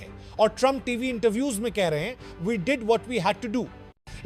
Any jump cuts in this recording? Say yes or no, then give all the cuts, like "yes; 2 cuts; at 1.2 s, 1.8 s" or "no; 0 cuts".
no; 0 cuts